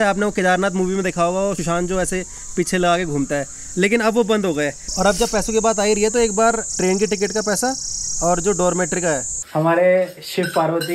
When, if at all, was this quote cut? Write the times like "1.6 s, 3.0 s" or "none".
1.6 s, 4.8 s, 6.7 s, 9.4 s